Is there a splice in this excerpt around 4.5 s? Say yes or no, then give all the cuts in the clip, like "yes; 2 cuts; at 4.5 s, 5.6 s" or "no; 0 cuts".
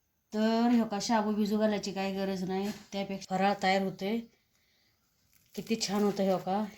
no; 1 cut; at 3.1 s